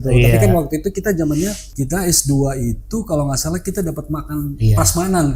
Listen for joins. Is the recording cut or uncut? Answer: cut